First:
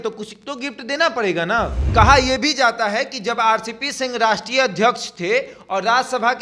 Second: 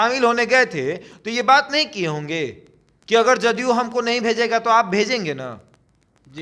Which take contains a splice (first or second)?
first